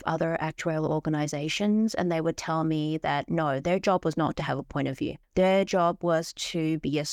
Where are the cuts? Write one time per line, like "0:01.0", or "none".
none